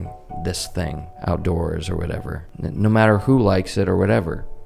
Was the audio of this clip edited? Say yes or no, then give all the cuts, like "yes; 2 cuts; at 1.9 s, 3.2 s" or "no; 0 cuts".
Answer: yes; 2 cuts; at 1.1 s, 2.4 s